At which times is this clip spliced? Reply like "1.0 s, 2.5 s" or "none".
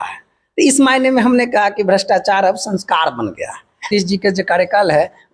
3.9 s